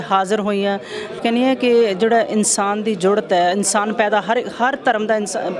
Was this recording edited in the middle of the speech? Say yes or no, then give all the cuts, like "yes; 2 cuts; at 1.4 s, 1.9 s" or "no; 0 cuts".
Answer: yes; 1 cut; at 1.2 s